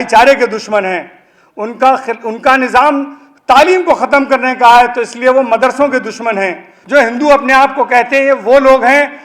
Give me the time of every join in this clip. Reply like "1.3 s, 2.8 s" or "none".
6.7 s